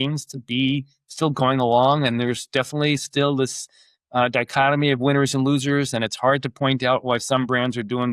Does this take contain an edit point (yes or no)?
no